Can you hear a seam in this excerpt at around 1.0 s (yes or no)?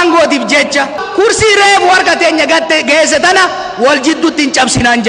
yes